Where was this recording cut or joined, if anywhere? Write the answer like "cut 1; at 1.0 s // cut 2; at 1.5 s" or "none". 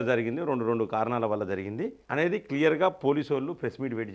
none